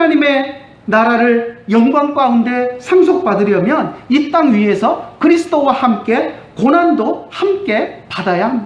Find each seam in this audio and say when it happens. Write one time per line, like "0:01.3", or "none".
none